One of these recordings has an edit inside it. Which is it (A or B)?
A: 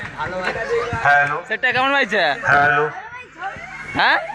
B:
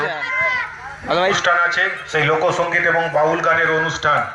B